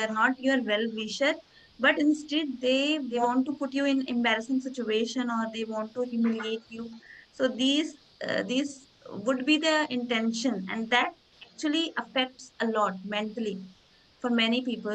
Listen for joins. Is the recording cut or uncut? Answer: cut